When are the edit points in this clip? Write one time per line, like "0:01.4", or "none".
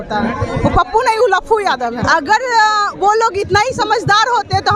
0:02.0